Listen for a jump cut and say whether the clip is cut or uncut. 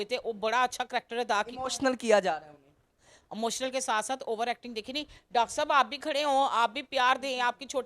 uncut